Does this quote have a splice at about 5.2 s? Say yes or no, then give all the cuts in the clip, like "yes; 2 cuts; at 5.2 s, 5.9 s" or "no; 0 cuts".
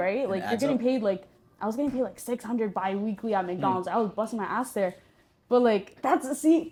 no; 0 cuts